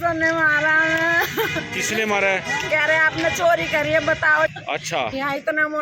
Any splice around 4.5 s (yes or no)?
yes